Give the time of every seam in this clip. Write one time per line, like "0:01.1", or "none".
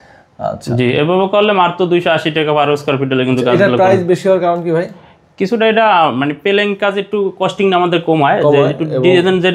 none